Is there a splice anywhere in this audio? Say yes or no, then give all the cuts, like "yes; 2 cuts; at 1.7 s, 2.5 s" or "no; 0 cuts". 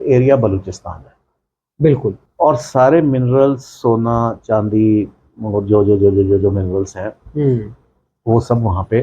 yes; 1 cut; at 2.2 s